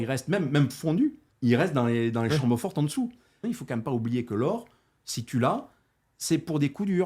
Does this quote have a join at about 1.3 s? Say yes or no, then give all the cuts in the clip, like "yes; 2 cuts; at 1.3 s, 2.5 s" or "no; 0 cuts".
yes; 2 cuts; at 1.3 s, 3.4 s